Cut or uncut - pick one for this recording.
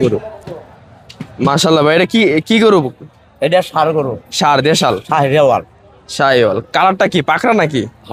uncut